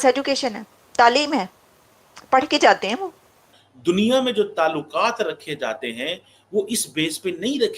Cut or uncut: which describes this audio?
cut